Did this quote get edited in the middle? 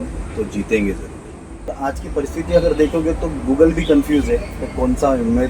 yes; 1 cut; at 1.7 s

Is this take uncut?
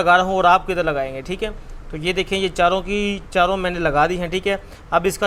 yes; 0 cuts

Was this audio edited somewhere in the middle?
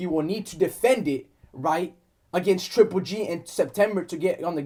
no; 0 cuts

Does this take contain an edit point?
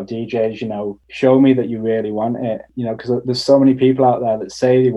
yes; 2 cuts; at 1.0 s, 2.7 s

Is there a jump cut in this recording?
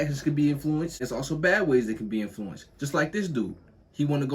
yes; 1 cut; at 1.0 s

